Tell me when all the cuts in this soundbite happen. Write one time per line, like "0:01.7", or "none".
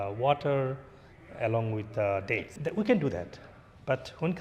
0:02.5